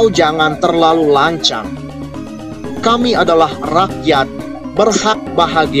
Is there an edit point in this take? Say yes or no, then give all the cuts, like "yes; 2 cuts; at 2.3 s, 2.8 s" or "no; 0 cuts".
no; 0 cuts